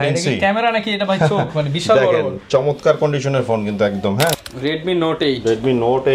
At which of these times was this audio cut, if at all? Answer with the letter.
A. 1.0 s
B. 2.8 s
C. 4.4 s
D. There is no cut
C